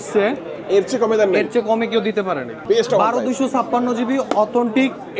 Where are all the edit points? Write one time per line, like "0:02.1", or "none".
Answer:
0:02.5